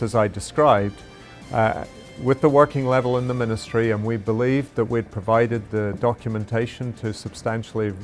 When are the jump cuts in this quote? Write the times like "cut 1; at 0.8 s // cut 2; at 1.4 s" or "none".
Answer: none